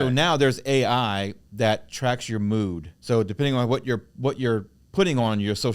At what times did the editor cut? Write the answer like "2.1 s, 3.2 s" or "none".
2.9 s, 4.8 s